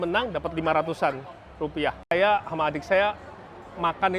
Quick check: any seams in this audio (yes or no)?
yes